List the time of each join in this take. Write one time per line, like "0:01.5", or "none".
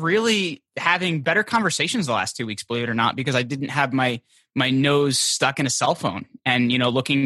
0:01.2

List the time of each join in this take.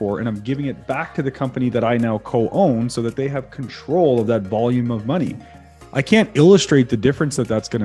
none

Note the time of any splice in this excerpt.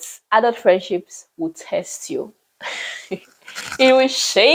none

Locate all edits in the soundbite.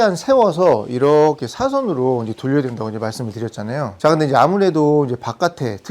none

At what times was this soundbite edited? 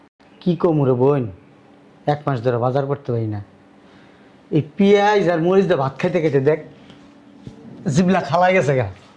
none

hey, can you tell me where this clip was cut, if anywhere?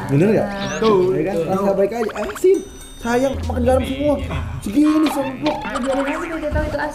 none

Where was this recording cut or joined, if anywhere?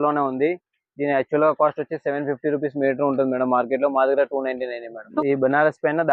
0:05.0

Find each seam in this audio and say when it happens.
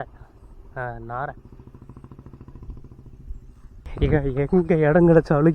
0:03.8

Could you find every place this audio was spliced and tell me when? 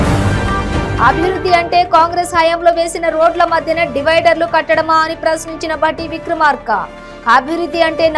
none

